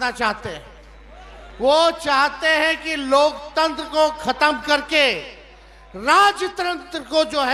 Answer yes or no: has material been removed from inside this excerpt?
no